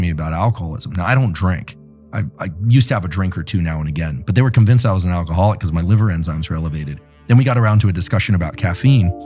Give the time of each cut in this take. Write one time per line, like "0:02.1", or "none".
none